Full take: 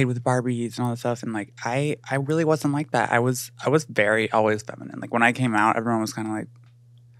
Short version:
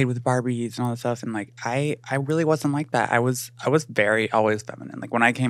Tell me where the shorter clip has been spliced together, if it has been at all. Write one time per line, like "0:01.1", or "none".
none